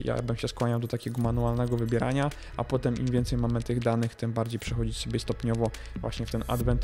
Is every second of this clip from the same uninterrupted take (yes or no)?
yes